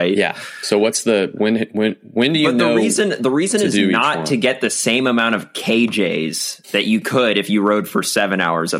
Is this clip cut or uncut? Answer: uncut